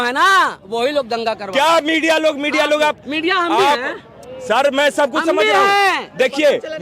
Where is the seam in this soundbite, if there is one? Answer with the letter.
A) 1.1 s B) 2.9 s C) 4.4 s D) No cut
D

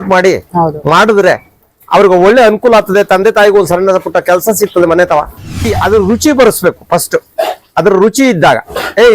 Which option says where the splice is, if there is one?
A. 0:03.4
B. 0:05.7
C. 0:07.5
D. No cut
B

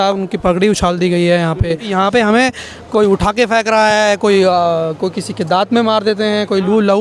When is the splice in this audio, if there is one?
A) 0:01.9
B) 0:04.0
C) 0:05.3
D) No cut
A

